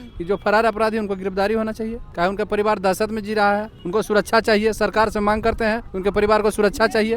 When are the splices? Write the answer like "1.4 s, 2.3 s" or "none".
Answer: 2.0 s, 3.8 s, 5.9 s